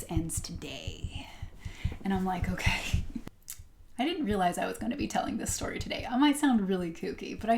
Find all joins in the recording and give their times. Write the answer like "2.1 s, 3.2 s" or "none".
3.3 s